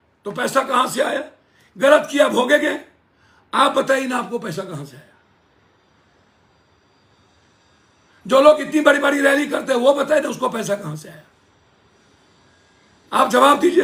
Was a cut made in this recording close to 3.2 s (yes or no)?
no